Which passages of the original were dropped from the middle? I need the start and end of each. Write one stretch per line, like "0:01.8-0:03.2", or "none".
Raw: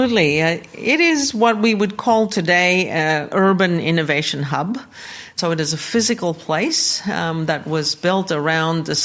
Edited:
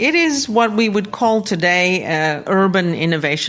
none